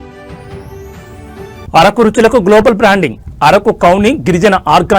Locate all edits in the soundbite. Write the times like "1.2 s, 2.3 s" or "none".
1.1 s